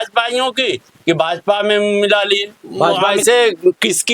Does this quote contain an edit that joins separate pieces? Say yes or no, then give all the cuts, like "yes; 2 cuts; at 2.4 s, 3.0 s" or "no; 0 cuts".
yes; 1 cut; at 3.1 s